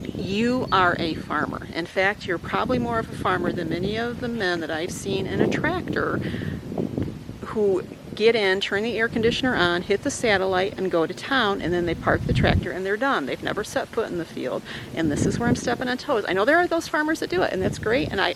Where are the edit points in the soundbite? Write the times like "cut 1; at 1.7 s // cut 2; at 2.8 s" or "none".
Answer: none